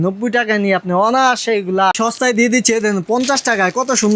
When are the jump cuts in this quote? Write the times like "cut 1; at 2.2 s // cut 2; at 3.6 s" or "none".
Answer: cut 1; at 1.9 s